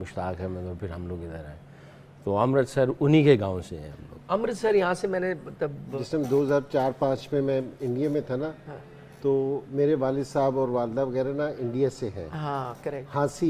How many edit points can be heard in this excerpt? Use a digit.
1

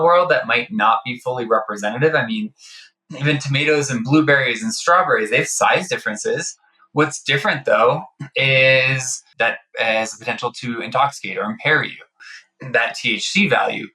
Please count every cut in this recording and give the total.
2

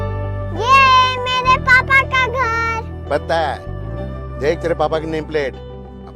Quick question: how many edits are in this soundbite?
0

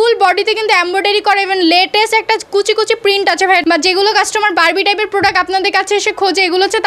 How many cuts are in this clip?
1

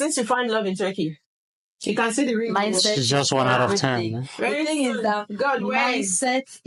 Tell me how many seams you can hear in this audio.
0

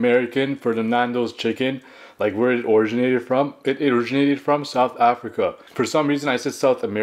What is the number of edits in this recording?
1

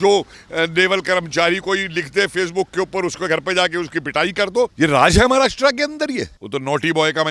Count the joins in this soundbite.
2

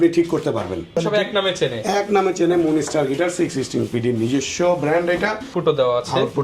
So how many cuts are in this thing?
2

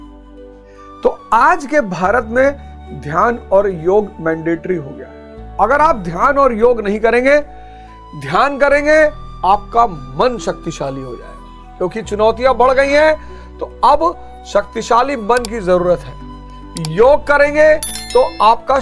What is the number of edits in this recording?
1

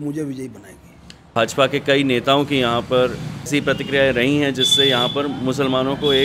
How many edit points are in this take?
2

